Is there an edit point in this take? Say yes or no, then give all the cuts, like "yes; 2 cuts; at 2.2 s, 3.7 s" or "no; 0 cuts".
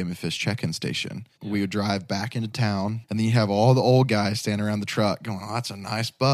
yes; 2 cuts; at 1.4 s, 3.0 s